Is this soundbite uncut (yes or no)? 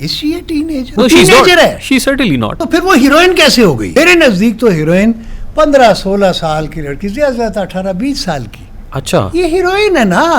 no